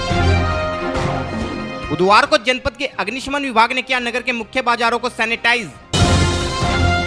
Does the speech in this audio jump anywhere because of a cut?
no; 0 cuts

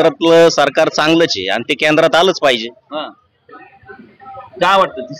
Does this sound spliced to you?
no; 0 cuts

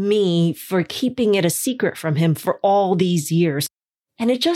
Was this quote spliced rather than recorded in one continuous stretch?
yes; 1 cut; at 3.7 s

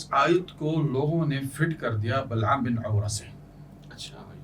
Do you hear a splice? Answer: no; 0 cuts

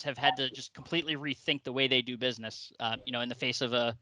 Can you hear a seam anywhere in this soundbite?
no; 0 cuts

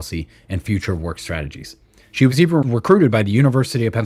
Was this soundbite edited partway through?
yes; 1 cut; at 2.7 s

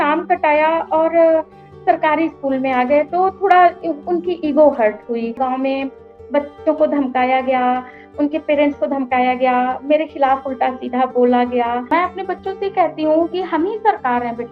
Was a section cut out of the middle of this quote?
yes; 2 cuts; at 5.4 s, 11.9 s

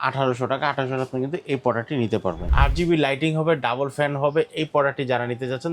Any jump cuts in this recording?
yes; 1 cut; at 2.5 s

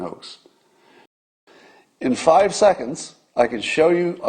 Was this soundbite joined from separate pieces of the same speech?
yes; 1 cut; at 1.2 s

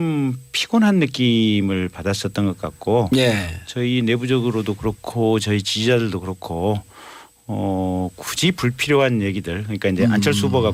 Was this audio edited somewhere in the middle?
no; 0 cuts

